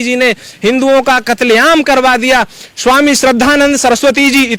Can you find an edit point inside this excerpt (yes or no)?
no